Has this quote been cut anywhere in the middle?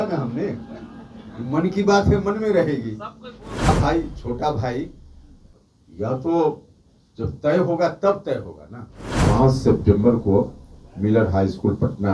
yes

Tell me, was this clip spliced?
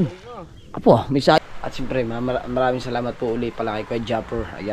yes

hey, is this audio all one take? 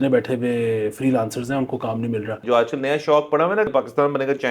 no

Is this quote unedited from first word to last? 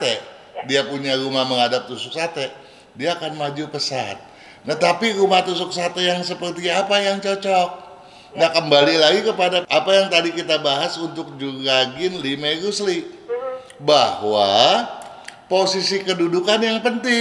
yes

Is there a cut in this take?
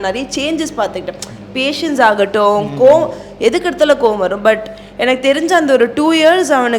no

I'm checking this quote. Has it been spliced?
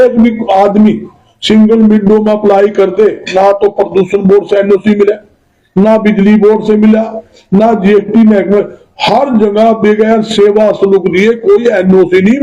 no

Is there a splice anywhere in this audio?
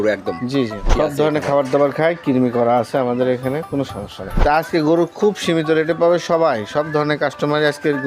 yes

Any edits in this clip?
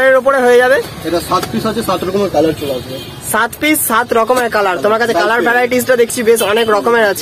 no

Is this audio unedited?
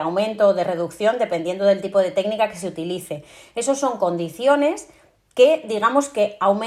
yes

